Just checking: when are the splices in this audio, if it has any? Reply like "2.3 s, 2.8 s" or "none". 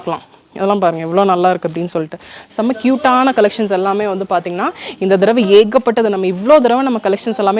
none